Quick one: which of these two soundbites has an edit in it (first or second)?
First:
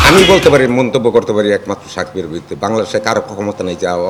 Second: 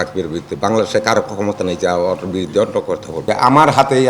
second